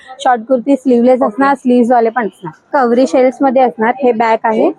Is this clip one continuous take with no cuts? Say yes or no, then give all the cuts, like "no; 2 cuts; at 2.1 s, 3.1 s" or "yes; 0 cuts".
no; 1 cut; at 2.7 s